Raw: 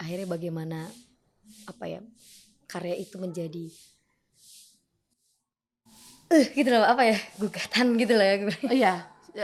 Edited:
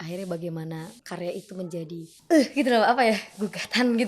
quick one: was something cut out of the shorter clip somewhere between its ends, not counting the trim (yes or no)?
yes